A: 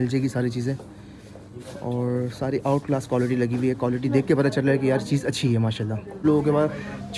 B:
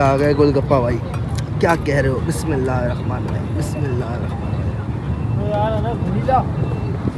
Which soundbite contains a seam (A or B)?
A